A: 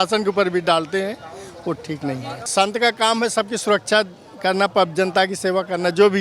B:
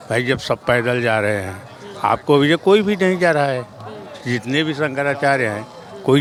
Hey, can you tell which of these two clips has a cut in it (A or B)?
A